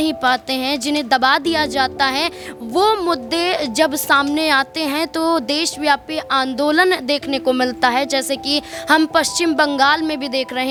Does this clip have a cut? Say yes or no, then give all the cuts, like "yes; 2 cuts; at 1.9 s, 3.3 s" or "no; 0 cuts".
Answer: no; 0 cuts